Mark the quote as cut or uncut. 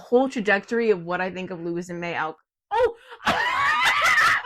uncut